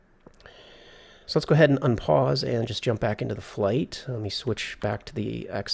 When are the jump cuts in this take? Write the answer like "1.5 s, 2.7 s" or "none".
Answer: 2.0 s